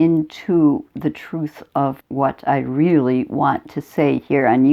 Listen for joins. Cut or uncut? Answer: cut